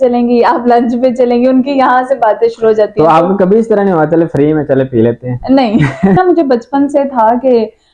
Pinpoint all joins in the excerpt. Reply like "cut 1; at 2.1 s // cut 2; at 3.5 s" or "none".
cut 1; at 6.2 s